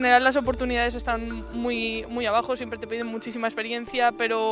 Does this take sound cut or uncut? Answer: uncut